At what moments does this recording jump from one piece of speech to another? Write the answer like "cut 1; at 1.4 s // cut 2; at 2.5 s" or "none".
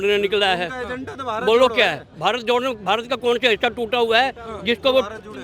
none